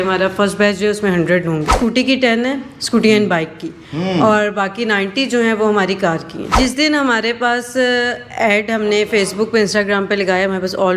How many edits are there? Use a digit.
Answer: 2